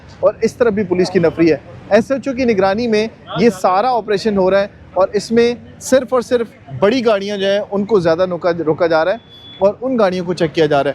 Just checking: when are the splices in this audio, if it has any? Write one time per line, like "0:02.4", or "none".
none